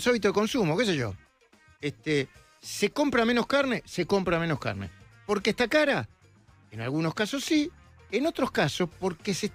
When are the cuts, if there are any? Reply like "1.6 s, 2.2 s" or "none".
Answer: none